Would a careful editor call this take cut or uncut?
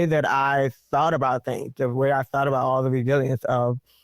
uncut